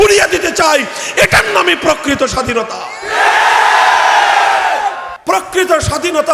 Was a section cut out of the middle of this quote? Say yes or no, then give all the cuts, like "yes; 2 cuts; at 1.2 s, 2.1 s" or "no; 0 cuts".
yes; 1 cut; at 5.1 s